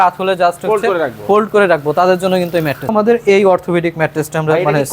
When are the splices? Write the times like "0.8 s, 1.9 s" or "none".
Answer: 2.9 s